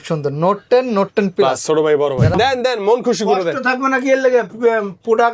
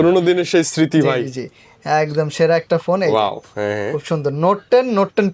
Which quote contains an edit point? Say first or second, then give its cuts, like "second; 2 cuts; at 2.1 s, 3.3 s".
first; 1 cut; at 2.3 s